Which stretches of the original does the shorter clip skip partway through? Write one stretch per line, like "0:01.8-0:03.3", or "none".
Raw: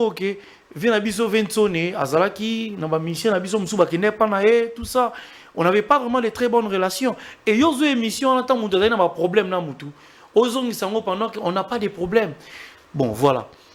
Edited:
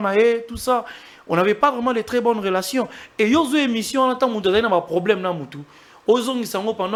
none